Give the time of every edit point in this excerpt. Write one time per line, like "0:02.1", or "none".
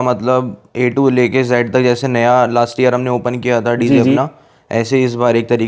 none